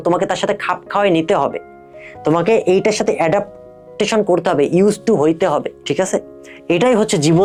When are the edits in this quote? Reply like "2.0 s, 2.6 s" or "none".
none